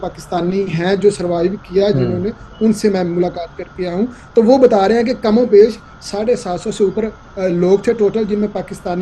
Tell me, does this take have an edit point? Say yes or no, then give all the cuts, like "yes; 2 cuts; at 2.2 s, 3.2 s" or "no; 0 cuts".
no; 0 cuts